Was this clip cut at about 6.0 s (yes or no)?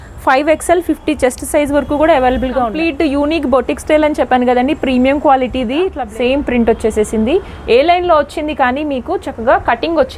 yes